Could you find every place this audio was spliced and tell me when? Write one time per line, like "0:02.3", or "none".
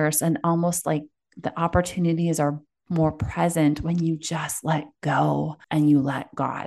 0:05.6